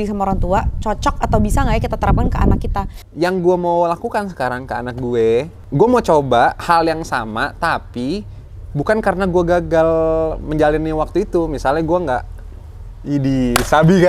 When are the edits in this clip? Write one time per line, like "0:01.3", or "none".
0:03.0
0:05.6